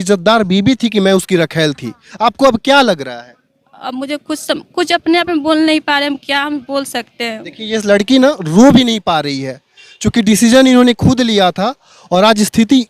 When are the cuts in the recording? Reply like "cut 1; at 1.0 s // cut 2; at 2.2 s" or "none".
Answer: none